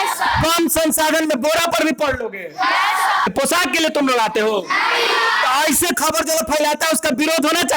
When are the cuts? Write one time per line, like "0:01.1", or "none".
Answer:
0:03.3